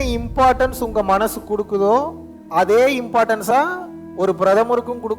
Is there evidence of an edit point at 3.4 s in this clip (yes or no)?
yes